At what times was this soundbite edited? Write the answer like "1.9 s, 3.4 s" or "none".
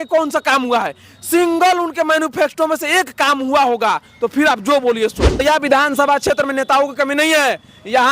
5.4 s